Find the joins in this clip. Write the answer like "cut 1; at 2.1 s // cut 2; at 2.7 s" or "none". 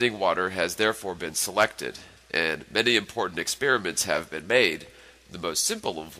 cut 1; at 3.3 s